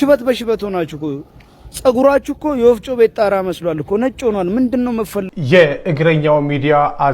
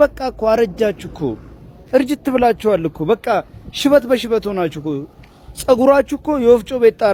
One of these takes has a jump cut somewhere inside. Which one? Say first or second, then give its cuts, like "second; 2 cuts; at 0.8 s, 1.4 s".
first; 1 cut; at 5.2 s